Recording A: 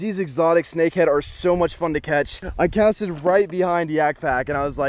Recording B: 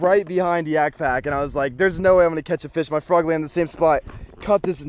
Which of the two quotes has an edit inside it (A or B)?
A